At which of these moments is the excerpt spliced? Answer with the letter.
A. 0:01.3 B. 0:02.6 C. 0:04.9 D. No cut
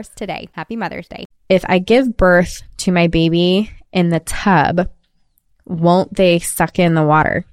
A